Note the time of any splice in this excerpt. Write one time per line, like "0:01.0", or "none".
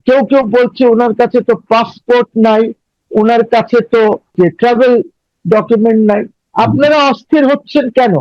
0:04.3